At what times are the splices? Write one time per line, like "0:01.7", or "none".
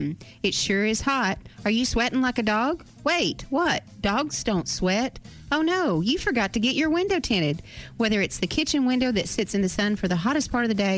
none